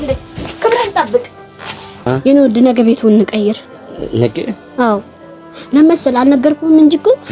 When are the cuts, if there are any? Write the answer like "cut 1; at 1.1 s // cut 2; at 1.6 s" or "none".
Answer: cut 1; at 2.0 s